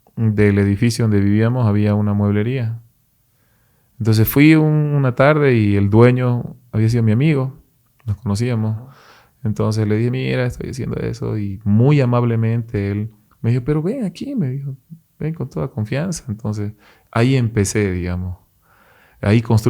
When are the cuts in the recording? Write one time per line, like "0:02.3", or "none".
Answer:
none